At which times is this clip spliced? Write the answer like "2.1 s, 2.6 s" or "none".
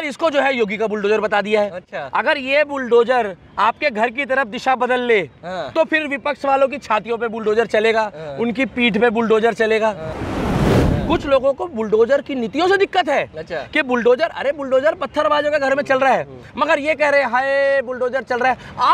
10.6 s